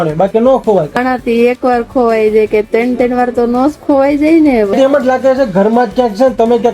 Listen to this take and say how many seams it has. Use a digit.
2